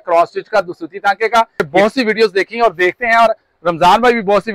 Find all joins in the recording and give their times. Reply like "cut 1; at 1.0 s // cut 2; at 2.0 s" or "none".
cut 1; at 1.7 s